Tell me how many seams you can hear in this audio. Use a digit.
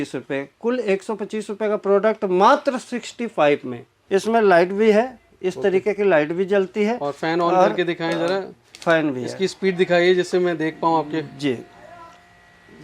1